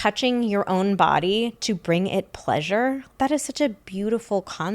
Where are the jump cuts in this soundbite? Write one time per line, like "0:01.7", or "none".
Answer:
0:03.0